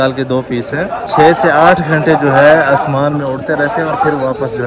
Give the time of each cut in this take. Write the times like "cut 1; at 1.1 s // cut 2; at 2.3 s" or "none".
cut 1; at 1.1 s